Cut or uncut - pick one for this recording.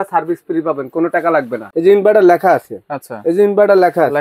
cut